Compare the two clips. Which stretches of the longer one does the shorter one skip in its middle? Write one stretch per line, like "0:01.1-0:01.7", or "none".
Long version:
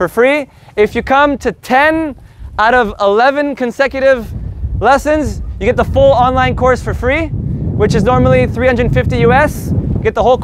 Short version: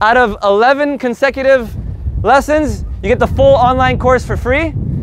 none